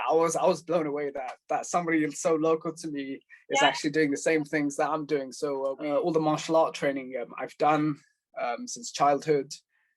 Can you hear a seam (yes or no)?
yes